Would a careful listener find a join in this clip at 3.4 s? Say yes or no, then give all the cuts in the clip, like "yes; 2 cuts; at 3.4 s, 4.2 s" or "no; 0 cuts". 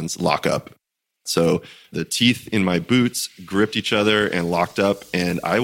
no; 2 cuts; at 1.1 s, 1.9 s